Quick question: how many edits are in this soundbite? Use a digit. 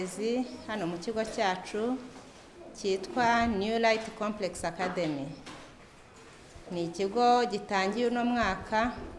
0